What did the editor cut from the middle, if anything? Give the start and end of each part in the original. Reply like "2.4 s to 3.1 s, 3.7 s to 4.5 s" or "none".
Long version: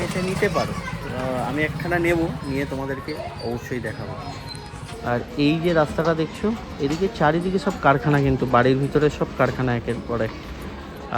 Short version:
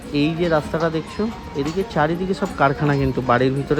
none